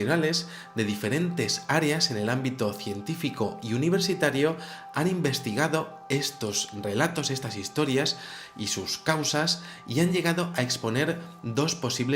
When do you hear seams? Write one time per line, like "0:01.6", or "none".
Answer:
none

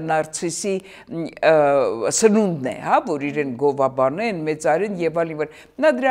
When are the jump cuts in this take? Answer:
none

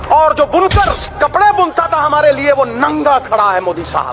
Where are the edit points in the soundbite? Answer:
0:01.0

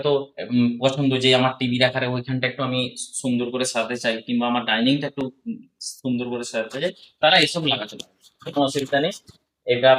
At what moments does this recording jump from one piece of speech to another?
none

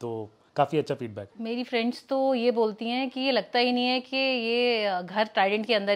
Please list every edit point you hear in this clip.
0:01.3

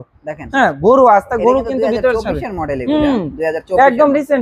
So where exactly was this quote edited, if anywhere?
none

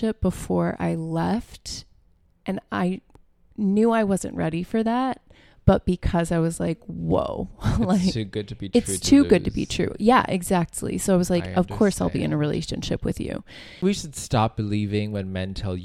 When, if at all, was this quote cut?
0:13.8

